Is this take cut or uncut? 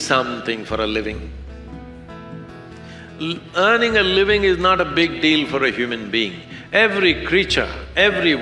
uncut